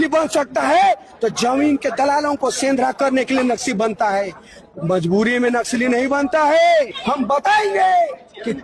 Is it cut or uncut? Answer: cut